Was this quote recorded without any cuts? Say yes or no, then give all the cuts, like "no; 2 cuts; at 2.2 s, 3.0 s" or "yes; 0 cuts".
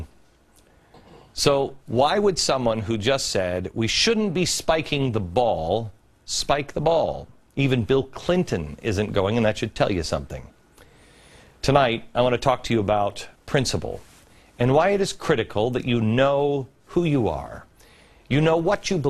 no; 1 cut; at 6.6 s